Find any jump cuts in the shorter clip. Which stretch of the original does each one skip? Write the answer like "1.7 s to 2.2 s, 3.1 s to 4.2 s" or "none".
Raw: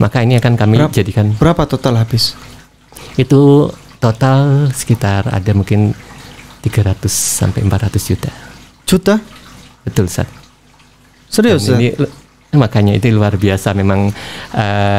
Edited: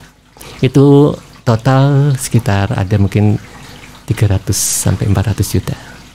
none

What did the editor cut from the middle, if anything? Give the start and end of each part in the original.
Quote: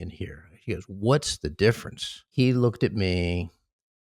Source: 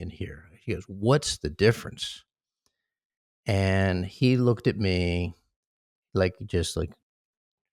2.2 s to 4.1 s

